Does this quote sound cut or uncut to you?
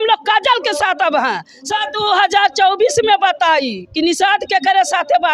cut